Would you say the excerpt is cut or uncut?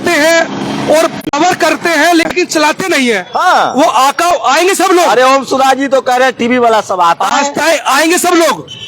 uncut